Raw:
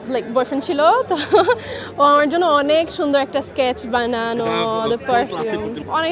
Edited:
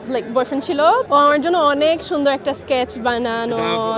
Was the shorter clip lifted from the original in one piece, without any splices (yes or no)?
no